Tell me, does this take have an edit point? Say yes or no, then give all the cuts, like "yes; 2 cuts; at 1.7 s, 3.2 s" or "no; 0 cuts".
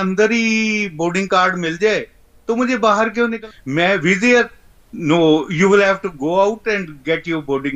yes; 1 cut; at 3.4 s